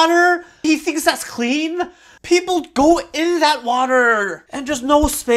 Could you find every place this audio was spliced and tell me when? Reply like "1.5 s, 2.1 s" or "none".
4.4 s